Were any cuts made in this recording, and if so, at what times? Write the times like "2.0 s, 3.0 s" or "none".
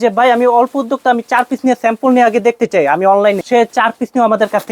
3.4 s